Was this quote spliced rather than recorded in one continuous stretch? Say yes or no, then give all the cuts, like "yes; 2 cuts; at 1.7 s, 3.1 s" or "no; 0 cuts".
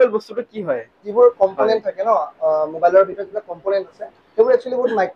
yes; 1 cut; at 1.0 s